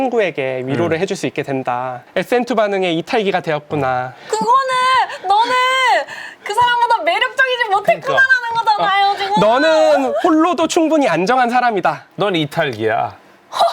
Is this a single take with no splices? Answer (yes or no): no